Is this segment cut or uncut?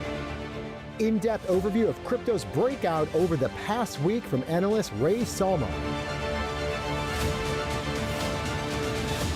uncut